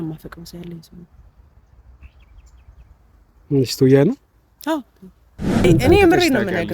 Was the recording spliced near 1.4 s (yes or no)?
no